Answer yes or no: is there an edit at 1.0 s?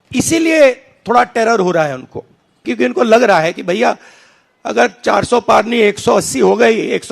no